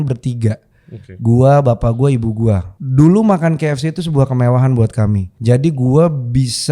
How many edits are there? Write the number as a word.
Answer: two